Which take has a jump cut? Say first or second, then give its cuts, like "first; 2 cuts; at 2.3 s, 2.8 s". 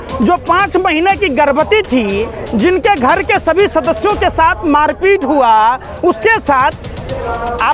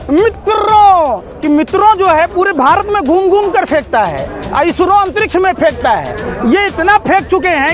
second; 1 cut; at 1.3 s